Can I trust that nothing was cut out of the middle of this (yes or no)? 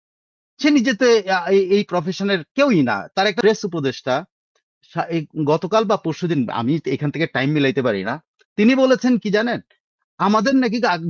no